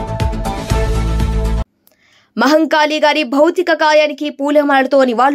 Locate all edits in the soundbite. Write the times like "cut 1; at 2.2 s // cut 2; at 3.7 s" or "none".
cut 1; at 1.5 s

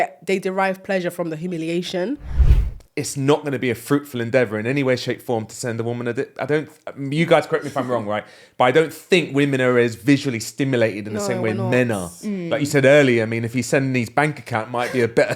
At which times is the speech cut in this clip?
cut 1; at 2.3 s

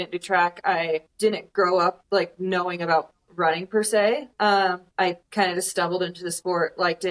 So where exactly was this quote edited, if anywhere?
cut 1; at 1.1 s // cut 2; at 2.0 s // cut 3; at 4.8 s

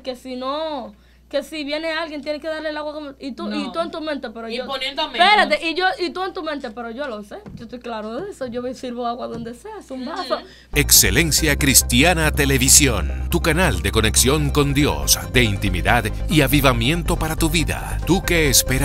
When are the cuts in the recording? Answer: cut 1; at 10.6 s

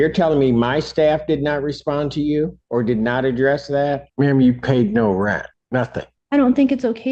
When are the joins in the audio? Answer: cut 1; at 2.6 s // cut 2; at 4.1 s // cut 3; at 5.8 s

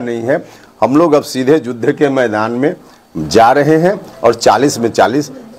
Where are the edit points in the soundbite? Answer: none

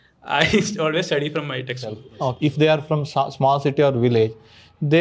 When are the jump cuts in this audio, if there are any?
cut 1; at 2.4 s

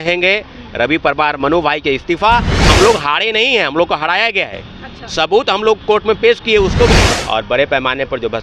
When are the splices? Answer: cut 1; at 2.6 s // cut 2; at 7.0 s

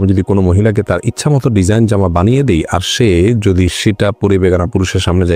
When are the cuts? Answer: none

